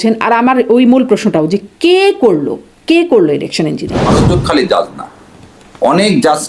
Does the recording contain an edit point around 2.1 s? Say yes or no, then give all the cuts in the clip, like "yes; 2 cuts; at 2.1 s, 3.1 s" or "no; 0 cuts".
no; 1 cut; at 4.2 s